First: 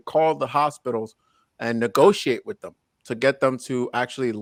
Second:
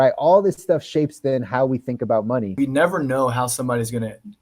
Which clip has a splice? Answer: second; 1 cut; at 2.5 s

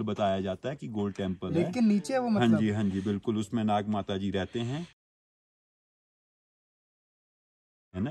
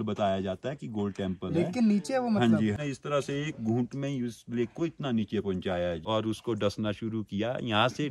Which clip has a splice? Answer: second; 2 cuts; at 2.8 s, 6.0 s

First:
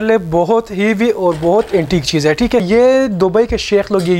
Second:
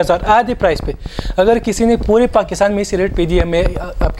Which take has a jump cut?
first; 1 cut; at 2.7 s

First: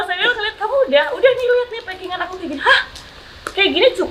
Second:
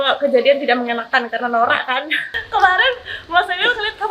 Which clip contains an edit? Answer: second; 1 cut; at 2.4 s

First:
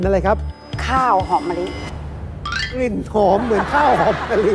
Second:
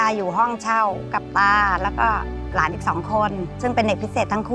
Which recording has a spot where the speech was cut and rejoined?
second; 3 cuts; at 1.1 s, 2.4 s, 3.5 s

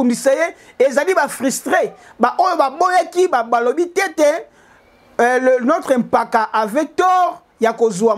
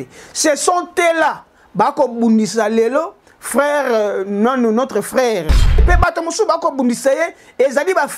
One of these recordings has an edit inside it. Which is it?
second; 1 cut; at 5.8 s

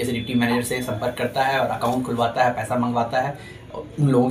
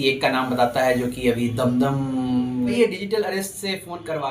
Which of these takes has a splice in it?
second; 1 cut; at 2.8 s

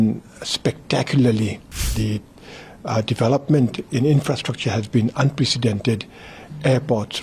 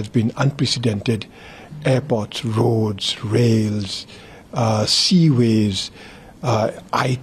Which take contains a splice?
first; 1 cut; at 1.9 s

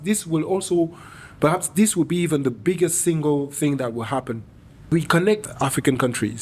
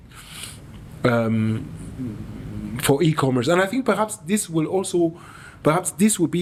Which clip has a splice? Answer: first; 2 cuts; at 4.9 s, 5.5 s

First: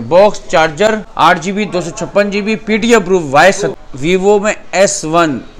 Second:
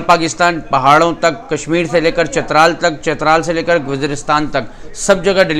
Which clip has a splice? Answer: first; 2 cuts; at 1.1 s, 3.7 s

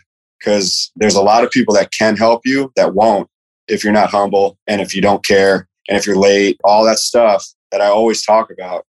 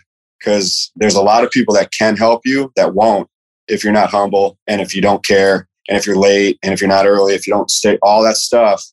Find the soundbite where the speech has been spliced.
first; 2 cuts; at 6.6 s, 7.6 s

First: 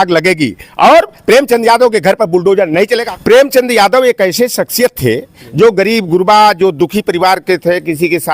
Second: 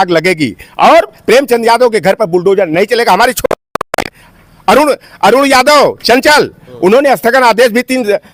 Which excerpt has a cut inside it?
first; 1 cut; at 3.0 s

